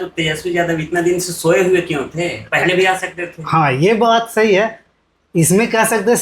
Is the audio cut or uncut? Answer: uncut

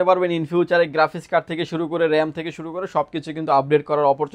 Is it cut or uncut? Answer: uncut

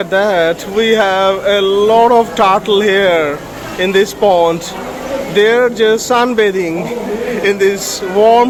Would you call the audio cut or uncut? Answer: uncut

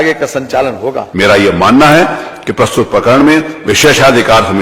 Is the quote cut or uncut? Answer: cut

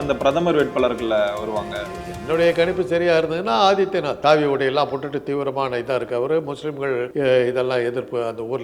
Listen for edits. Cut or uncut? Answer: cut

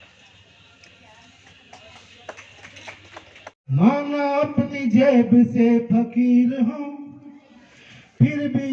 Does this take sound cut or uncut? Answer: cut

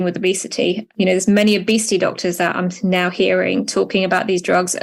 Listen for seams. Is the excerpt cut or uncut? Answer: uncut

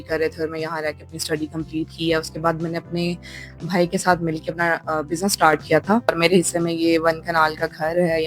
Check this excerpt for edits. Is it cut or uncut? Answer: cut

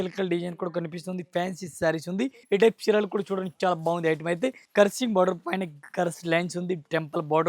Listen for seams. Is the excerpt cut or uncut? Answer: cut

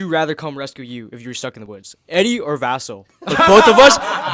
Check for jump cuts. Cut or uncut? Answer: uncut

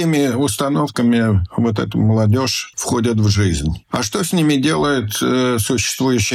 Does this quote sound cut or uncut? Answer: uncut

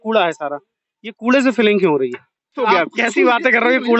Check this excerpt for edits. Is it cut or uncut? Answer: cut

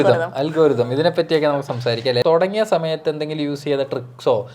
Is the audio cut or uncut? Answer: cut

